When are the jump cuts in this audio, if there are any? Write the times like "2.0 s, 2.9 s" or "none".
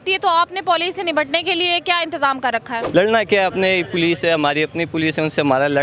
2.8 s